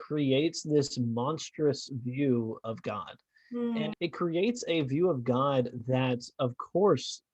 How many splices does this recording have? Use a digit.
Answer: 1